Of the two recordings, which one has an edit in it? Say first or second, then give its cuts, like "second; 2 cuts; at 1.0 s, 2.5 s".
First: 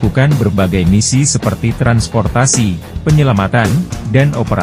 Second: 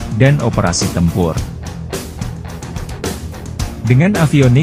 second; 2 cuts; at 1.9 s, 3.8 s